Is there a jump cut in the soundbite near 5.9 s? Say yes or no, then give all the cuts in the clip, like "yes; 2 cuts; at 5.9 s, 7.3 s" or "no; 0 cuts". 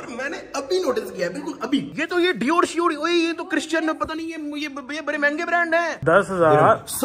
yes; 2 cuts; at 1.9 s, 5.9 s